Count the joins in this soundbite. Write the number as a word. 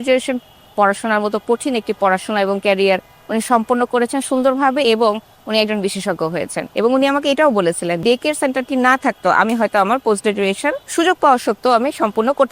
two